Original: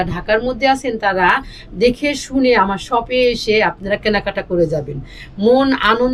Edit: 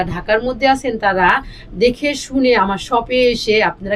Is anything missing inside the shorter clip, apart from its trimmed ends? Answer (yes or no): no